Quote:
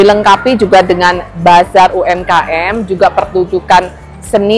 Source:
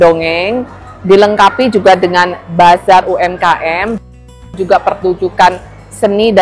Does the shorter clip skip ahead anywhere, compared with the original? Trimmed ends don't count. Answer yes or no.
yes